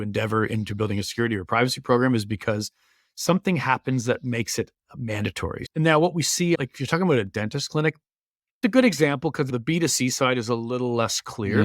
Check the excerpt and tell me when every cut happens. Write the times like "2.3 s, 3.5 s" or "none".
5.7 s, 6.6 s, 8.6 s, 9.5 s